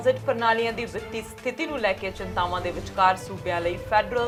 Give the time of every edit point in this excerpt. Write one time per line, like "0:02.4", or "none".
none